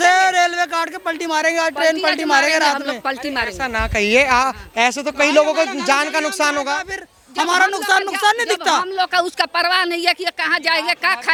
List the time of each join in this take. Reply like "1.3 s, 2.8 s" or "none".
none